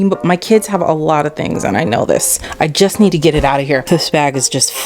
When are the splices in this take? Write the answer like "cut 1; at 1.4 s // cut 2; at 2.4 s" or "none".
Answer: cut 1; at 2.4 s // cut 2; at 3.8 s